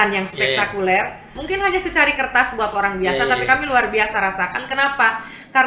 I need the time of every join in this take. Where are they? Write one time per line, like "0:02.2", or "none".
0:01.3